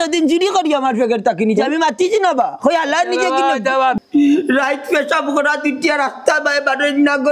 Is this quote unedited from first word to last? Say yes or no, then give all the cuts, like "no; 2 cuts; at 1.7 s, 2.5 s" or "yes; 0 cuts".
no; 1 cut; at 3.9 s